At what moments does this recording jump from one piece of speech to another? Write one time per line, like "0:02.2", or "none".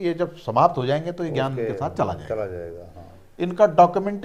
none